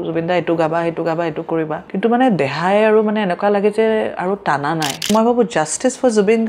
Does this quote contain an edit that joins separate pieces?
yes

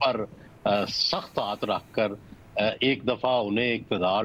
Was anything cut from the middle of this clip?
no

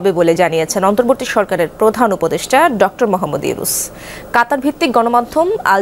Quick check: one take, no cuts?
yes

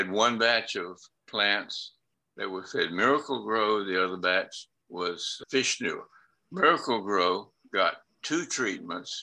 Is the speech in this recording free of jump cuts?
yes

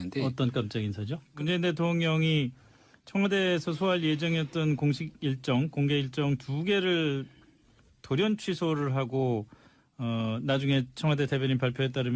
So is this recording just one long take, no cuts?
no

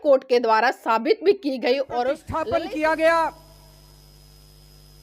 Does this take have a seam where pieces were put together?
yes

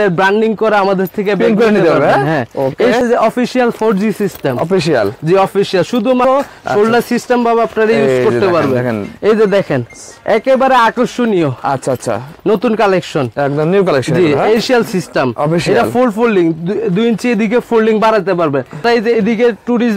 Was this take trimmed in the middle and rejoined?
yes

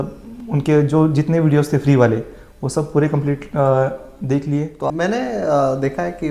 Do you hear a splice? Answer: yes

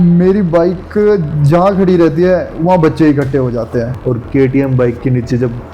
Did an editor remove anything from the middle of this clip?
yes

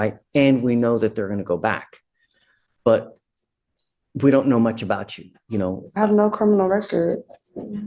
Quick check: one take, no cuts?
yes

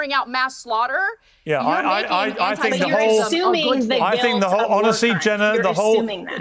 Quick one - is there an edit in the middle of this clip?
no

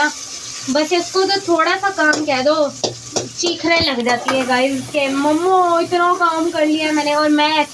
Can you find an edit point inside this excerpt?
no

